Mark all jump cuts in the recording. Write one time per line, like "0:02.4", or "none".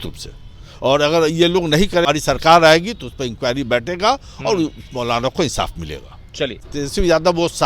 0:02.1
0:06.6